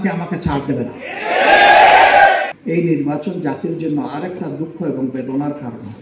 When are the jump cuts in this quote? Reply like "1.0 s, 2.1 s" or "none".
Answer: 2.6 s